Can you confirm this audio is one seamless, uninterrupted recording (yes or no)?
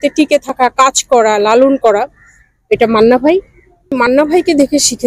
no